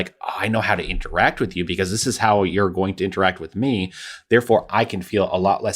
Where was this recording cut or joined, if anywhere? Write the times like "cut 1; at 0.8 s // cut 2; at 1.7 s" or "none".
cut 1; at 4.7 s